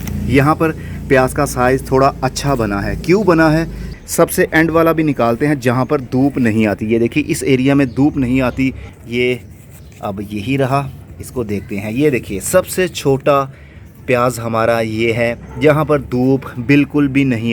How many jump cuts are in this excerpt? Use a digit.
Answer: 2